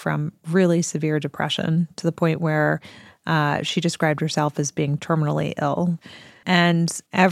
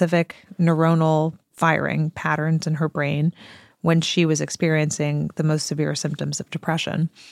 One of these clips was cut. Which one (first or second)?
first